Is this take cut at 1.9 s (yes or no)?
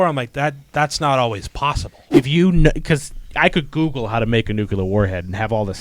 yes